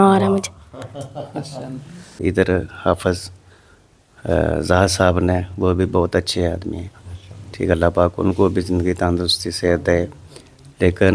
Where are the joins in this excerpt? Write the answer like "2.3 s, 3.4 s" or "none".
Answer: 2.2 s